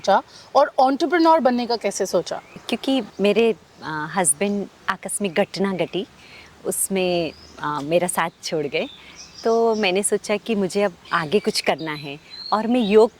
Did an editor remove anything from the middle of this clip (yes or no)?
no